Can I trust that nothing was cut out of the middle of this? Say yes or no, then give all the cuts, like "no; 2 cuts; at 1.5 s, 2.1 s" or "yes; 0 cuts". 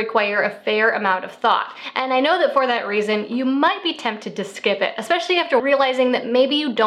no; 1 cut; at 5.6 s